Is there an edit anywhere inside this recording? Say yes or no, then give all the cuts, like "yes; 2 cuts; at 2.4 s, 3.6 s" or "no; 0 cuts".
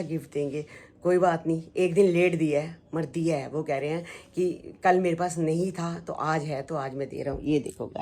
no; 0 cuts